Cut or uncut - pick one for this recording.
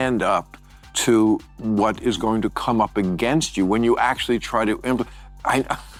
uncut